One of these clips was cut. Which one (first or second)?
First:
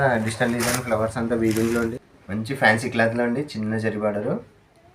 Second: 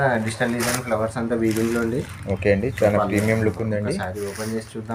first